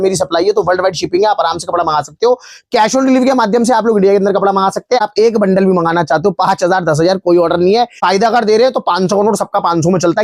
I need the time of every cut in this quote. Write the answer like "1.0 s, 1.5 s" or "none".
5.0 s, 8.0 s